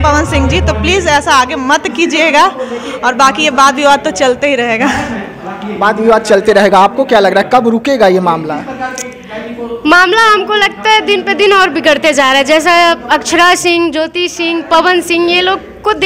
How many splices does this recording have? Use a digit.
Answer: 0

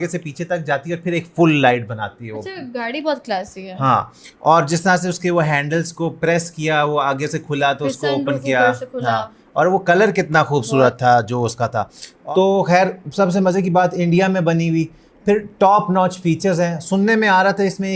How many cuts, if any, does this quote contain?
0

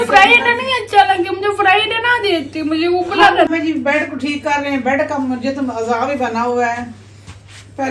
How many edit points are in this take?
1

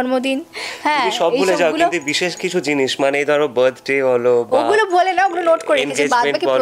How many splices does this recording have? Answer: 0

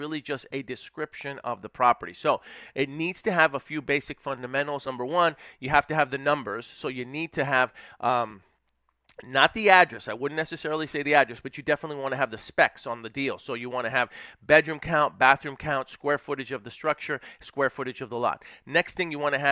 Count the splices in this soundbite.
1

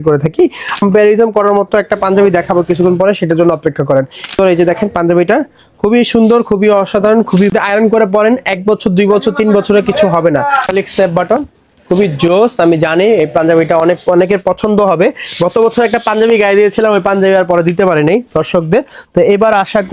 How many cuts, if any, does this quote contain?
4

